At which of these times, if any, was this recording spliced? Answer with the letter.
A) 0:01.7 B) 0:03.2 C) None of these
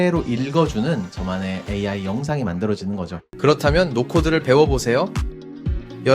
B